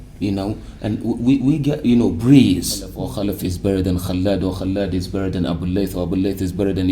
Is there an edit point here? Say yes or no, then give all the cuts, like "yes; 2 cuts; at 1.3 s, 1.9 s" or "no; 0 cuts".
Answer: yes; 1 cut; at 3.0 s